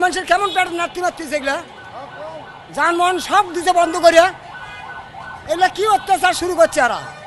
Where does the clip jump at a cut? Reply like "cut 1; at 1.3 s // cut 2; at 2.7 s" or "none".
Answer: none